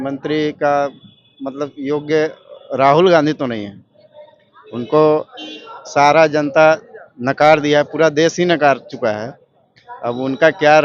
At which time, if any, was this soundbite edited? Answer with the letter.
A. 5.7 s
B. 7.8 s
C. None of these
C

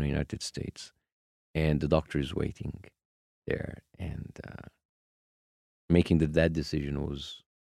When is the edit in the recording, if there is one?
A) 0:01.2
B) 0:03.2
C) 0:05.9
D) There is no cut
D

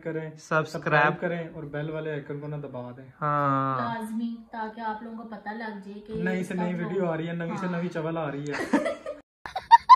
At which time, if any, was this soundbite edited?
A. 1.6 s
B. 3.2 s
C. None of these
C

